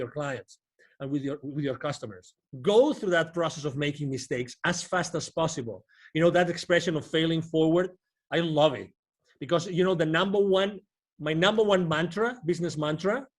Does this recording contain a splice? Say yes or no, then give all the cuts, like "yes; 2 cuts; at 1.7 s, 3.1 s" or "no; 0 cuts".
yes; 1 cut; at 2.5 s